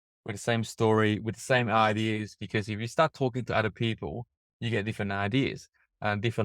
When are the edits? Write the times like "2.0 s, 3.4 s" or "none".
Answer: none